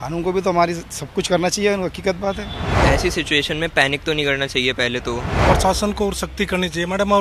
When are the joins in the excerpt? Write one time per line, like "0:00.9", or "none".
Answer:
0:02.8
0:05.4